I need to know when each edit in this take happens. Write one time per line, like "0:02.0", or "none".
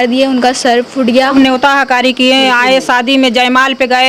0:01.3

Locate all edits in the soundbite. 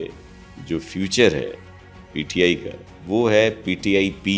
none

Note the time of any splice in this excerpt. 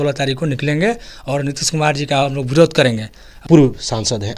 0:03.4

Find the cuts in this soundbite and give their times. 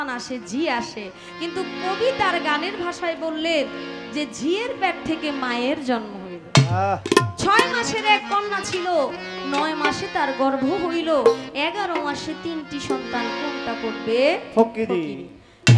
none

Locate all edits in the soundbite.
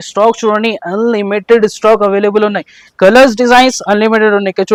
none

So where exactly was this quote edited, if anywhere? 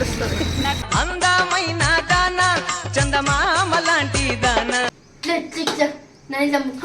0:04.9

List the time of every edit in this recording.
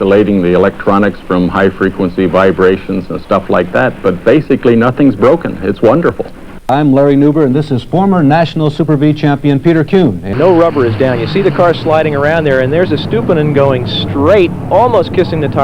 0:06.7
0:10.3

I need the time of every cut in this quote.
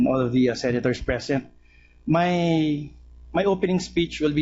none

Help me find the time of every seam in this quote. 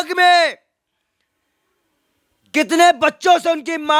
none

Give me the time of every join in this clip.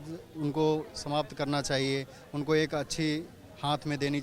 none

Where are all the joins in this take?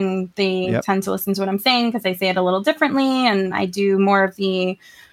none

